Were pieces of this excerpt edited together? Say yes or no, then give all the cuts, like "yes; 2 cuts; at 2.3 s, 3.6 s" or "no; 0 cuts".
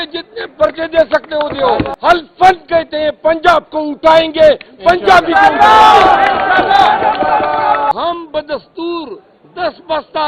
yes; 2 cuts; at 1.9 s, 7.9 s